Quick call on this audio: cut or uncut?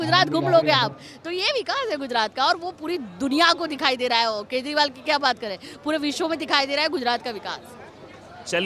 uncut